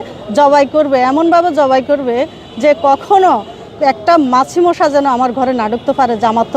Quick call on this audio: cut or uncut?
uncut